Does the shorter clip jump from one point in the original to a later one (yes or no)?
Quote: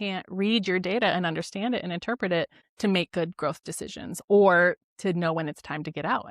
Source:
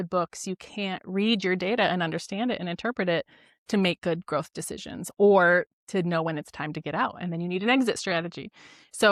yes